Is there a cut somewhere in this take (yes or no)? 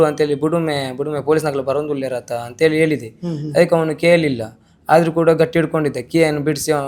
no